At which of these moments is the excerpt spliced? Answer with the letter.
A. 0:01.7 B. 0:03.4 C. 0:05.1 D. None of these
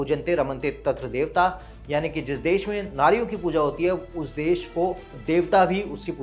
C